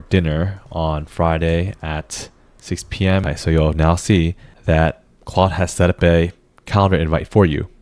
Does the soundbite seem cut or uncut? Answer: cut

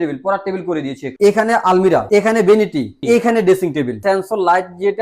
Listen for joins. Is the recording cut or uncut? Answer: cut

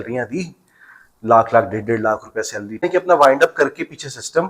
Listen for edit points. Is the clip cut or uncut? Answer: cut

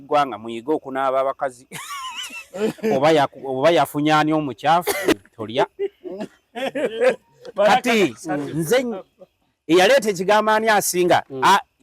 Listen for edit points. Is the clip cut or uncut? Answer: cut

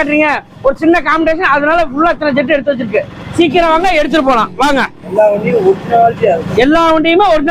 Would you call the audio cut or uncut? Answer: uncut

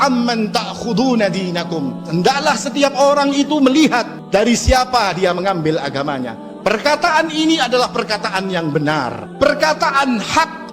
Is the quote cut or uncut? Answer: uncut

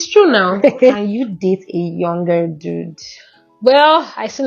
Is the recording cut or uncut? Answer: cut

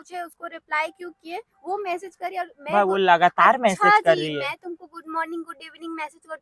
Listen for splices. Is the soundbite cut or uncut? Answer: uncut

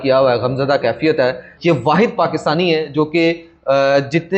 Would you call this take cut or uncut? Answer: cut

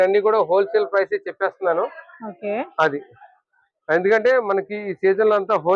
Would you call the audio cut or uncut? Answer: uncut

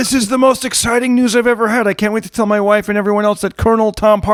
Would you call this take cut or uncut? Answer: uncut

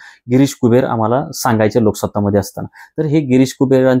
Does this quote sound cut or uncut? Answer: uncut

